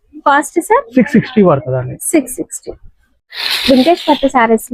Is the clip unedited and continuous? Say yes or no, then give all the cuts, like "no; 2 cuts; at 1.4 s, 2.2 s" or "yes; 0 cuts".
yes; 0 cuts